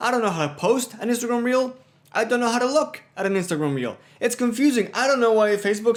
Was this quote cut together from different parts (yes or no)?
no